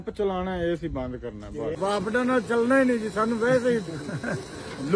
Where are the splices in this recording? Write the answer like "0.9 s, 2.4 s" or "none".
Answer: 1.8 s